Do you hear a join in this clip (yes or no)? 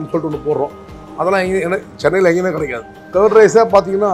no